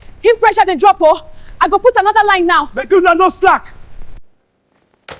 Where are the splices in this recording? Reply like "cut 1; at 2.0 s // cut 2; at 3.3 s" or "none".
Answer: none